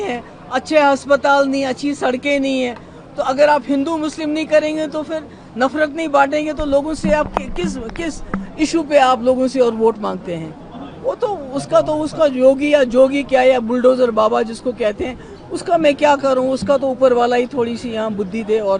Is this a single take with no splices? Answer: yes; 0 cuts

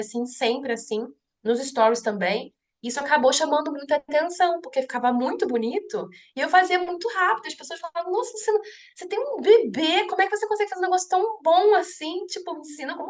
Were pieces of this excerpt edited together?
no; 0 cuts

